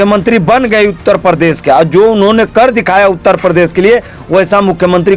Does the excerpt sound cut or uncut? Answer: uncut